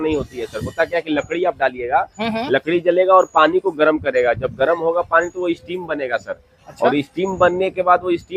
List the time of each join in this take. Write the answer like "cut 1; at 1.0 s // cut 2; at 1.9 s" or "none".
none